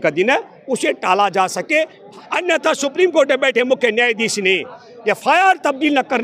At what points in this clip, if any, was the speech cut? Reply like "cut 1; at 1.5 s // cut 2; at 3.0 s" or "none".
cut 1; at 2.0 s